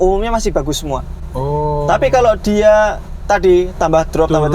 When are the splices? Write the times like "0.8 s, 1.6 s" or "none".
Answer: none